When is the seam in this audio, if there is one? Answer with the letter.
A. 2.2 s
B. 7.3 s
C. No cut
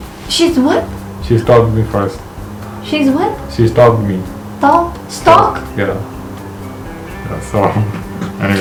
C